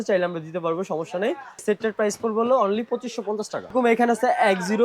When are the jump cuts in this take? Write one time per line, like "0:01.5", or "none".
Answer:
0:01.6
0:03.7